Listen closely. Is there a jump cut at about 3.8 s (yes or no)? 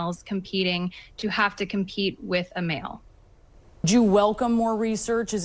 yes